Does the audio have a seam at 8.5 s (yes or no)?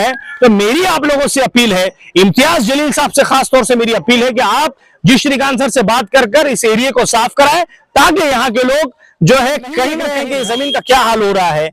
no